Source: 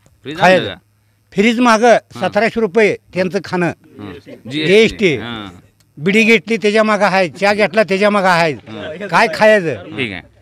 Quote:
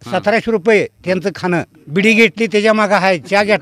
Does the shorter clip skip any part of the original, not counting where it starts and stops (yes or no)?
yes